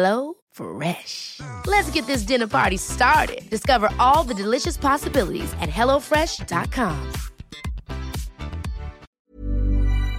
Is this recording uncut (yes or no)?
no